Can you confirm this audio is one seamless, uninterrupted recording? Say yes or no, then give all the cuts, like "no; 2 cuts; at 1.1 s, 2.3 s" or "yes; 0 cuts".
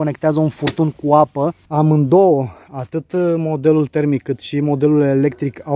no; 1 cut; at 1.6 s